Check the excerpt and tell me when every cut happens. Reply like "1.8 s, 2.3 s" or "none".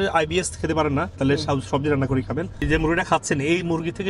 2.6 s